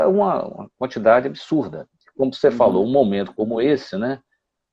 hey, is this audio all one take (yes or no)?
yes